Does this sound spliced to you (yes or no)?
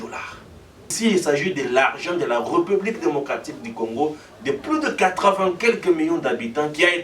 yes